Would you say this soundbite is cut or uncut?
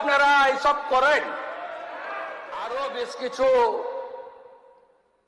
cut